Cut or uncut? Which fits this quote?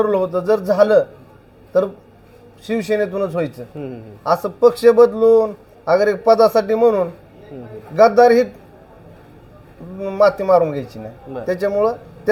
uncut